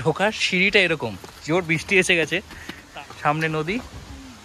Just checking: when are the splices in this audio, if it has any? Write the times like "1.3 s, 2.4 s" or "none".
2.7 s